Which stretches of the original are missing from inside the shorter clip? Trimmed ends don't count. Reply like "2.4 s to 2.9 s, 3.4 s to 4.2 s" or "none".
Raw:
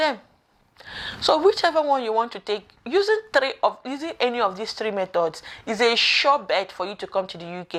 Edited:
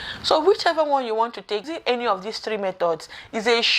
2.7 s to 4.1 s